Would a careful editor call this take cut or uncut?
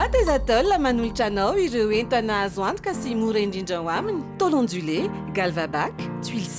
uncut